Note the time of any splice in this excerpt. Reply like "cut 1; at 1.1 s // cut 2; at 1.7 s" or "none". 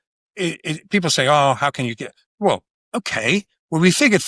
cut 1; at 2.8 s